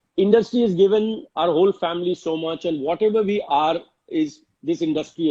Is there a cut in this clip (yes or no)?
no